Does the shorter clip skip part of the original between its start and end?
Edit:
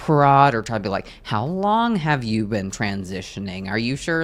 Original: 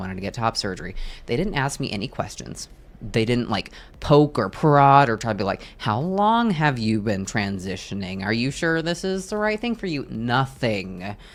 no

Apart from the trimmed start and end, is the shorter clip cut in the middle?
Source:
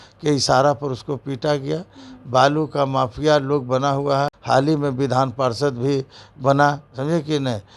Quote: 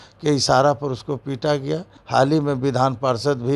yes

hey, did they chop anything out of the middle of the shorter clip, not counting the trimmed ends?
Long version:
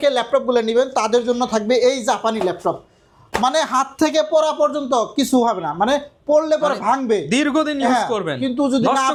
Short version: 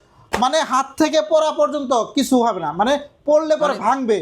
no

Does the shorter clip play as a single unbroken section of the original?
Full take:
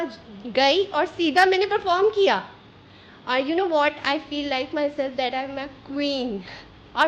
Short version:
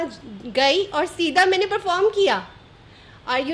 yes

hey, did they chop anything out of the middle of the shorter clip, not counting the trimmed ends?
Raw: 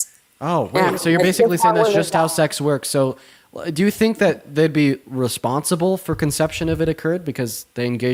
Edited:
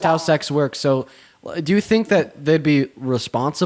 no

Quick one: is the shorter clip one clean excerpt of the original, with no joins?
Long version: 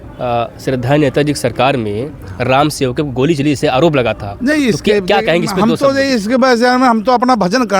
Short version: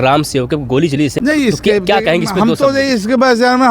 no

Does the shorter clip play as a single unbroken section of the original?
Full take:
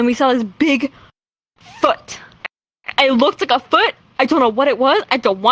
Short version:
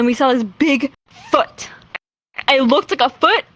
no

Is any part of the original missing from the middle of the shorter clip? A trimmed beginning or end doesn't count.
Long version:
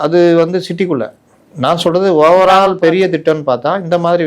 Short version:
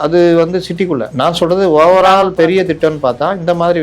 yes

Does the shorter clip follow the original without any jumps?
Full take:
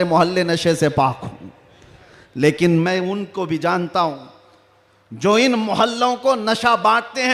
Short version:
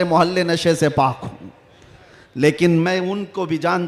yes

